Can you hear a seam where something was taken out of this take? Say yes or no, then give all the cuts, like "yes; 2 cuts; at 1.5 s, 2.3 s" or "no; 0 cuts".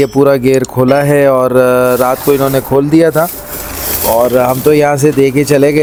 no; 0 cuts